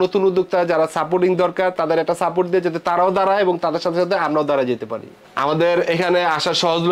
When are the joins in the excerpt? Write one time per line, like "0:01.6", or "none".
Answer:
none